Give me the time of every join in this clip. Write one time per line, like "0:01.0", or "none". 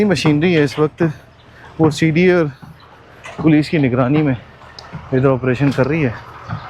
none